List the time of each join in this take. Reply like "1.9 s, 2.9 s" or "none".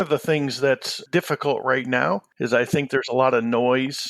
1.0 s, 2.3 s